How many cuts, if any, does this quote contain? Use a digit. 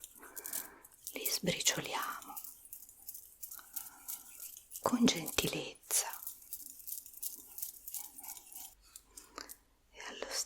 1